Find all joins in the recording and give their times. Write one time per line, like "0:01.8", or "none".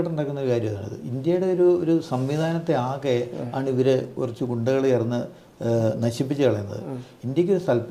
none